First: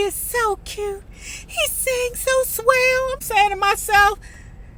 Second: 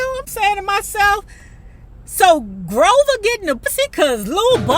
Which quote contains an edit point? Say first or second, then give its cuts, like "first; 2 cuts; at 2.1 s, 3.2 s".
second; 1 cut; at 3.7 s